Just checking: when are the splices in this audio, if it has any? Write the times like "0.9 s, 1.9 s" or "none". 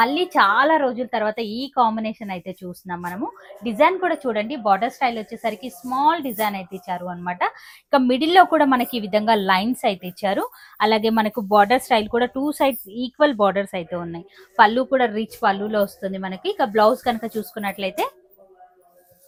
none